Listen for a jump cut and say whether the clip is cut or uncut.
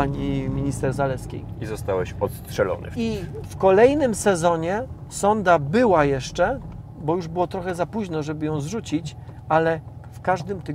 uncut